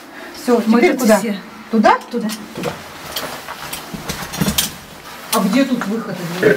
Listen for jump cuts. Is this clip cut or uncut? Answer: uncut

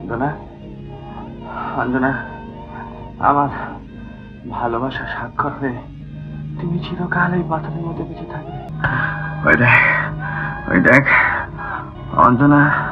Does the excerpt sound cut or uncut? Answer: cut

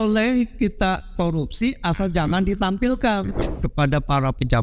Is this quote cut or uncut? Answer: cut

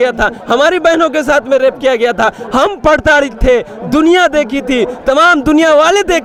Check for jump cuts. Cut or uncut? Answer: uncut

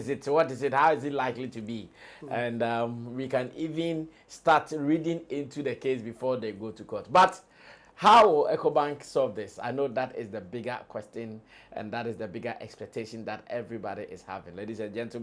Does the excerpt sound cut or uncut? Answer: uncut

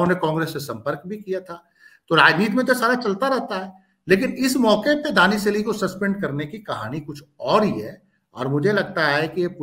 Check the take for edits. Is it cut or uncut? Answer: uncut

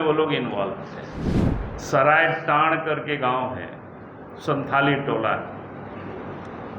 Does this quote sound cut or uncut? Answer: cut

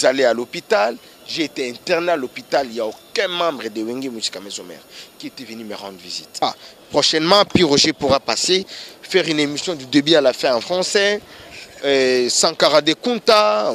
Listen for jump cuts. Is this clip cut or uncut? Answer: cut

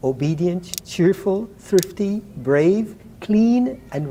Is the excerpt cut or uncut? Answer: uncut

